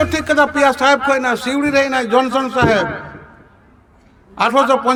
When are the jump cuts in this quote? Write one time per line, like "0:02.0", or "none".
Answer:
none